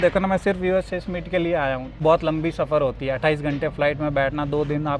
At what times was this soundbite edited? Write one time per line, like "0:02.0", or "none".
0:02.0